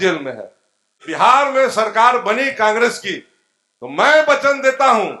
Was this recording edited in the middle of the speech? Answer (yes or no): yes